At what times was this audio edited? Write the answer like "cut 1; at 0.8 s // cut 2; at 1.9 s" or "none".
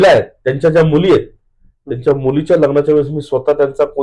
none

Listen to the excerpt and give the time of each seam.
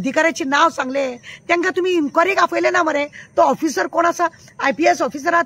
none

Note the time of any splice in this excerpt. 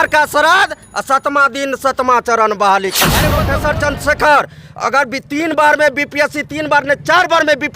cut 1; at 3.5 s

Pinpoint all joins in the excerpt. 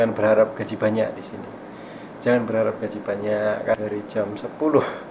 cut 1; at 3.7 s

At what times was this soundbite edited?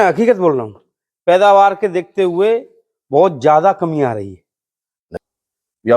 cut 1; at 5.0 s

